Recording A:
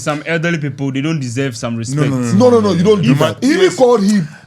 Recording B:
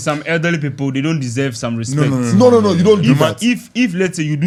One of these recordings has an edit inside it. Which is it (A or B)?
A